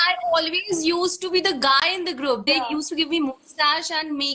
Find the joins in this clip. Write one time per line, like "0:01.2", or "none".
0:02.4